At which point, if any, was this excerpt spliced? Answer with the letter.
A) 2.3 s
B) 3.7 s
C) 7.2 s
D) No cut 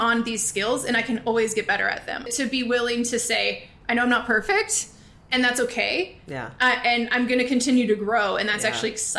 A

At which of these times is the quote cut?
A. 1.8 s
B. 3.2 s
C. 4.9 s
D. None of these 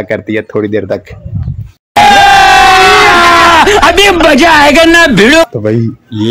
D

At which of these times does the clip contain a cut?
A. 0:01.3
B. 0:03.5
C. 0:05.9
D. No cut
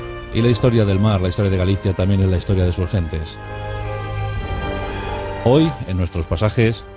C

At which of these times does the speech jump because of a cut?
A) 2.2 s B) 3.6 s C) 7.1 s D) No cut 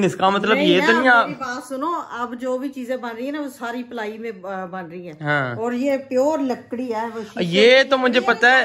D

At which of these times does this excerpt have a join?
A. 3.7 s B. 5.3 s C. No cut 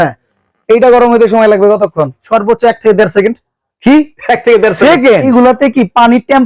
B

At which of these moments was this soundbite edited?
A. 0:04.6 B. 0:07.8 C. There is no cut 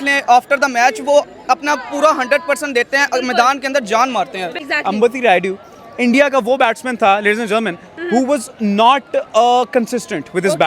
A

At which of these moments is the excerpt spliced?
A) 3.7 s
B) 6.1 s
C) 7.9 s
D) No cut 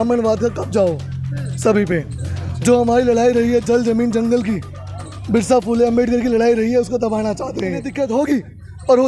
C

